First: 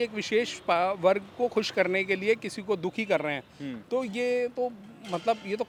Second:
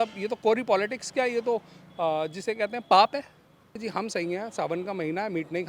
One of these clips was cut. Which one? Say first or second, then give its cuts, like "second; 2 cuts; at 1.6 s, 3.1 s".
second; 1 cut; at 3.7 s